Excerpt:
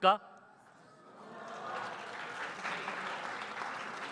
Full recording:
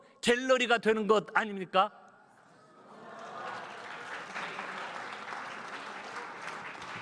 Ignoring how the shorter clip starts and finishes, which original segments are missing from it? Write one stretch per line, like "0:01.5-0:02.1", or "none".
none

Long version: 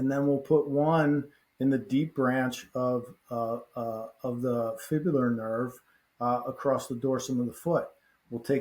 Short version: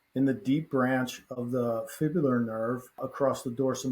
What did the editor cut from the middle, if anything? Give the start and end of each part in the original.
0:02.7-0:04.1
0:06.0-0:06.5

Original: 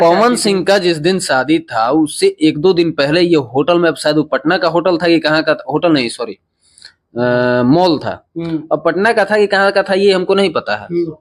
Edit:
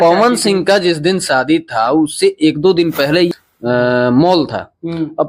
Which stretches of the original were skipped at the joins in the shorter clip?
0:03.3-0:06.8

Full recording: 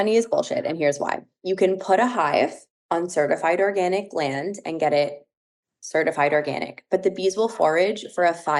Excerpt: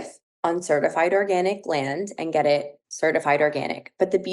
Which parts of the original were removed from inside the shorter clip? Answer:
0:05.3-0:05.7

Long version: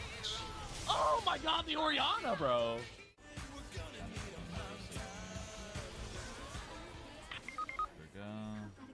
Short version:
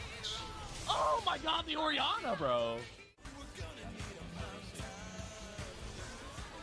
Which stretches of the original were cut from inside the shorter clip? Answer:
0:03.2-0:03.4

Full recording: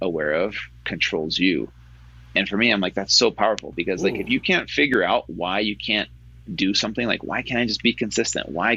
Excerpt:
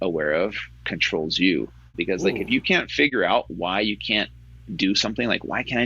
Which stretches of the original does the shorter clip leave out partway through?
0:01.9-0:03.7

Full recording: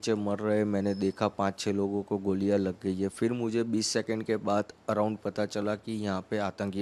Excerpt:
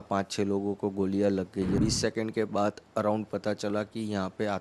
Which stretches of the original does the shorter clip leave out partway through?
0:03.1-0:03.7

